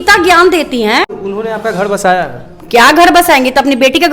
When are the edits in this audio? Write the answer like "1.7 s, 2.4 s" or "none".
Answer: 1.1 s